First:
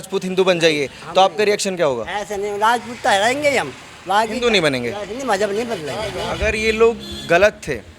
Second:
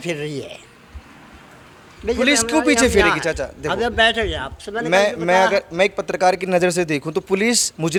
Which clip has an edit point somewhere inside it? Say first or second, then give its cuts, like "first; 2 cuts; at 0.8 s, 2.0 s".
first; 1 cut; at 6.2 s